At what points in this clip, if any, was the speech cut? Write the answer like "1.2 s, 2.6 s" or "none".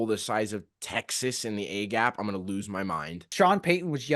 3.2 s